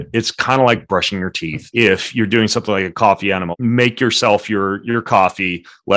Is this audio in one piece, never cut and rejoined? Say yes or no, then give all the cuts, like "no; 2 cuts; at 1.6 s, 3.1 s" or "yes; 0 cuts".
no; 2 cuts; at 1.5 s, 3.5 s